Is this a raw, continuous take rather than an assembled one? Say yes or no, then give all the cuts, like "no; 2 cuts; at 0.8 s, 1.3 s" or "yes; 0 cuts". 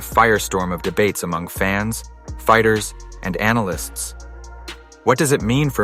no; 1 cut; at 2.3 s